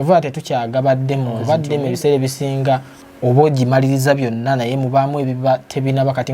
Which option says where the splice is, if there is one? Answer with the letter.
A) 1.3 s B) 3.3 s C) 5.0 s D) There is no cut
A